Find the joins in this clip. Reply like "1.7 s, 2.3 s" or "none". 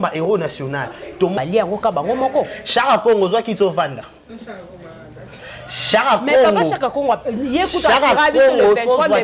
1.3 s